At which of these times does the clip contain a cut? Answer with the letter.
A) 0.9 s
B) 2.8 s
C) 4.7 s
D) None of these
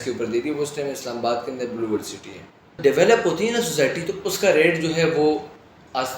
B